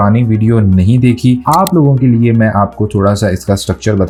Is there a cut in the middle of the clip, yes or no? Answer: no